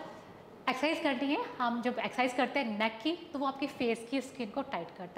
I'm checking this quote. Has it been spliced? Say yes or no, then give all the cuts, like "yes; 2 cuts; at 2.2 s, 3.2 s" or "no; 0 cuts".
no; 0 cuts